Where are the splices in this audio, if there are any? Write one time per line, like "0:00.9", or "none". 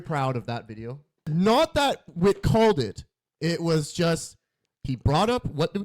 0:01.3